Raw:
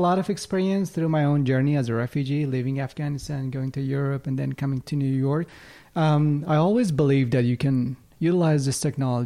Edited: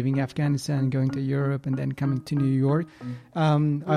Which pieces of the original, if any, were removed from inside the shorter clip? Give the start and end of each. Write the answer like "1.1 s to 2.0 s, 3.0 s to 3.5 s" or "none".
none